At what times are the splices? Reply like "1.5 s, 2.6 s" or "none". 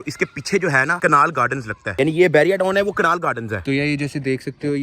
3.6 s